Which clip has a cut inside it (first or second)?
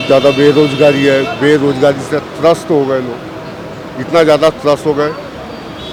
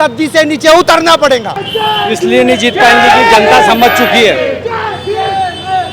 second